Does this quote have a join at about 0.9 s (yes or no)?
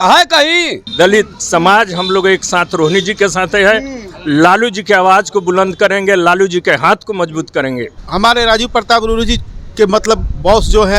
yes